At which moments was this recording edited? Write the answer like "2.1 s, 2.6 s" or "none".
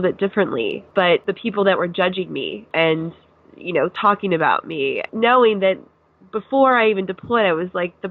1.2 s, 2.6 s, 5.0 s